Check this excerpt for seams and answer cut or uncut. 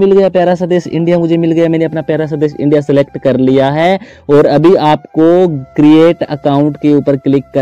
uncut